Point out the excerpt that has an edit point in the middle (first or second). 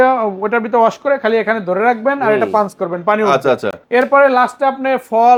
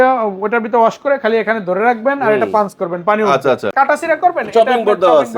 second